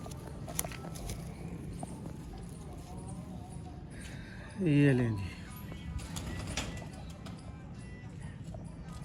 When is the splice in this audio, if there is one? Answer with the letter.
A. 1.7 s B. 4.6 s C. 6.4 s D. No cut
D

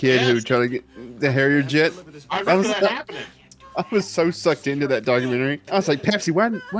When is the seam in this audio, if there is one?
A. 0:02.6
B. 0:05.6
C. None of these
B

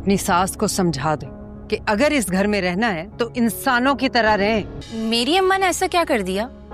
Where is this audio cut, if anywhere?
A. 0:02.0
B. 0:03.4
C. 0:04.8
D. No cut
C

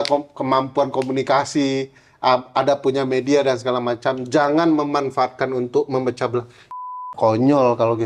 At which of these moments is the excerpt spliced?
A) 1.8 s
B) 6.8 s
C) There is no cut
B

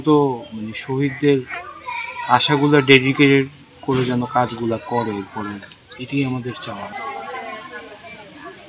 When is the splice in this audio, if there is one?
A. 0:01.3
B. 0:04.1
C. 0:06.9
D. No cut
C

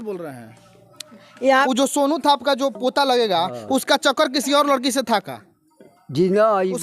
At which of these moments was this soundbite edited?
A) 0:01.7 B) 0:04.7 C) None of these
A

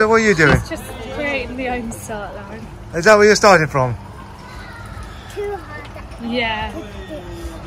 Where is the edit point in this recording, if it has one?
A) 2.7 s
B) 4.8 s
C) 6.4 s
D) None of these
D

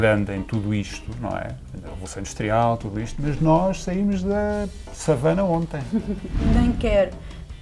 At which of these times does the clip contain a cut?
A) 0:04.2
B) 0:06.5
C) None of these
B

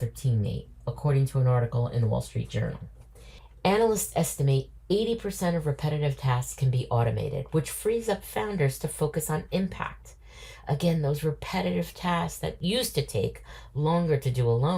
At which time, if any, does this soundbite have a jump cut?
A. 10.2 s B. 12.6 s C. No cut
B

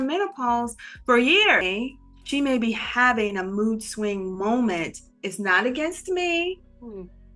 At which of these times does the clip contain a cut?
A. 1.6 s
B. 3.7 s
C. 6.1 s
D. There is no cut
A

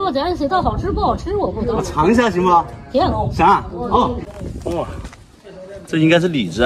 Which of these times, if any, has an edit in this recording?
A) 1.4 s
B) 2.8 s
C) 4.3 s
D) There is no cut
C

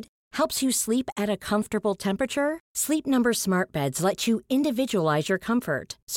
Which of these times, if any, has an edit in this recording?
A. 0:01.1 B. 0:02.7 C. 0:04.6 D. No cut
D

